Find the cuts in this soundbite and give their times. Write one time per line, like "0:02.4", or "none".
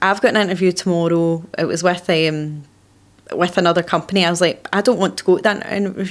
none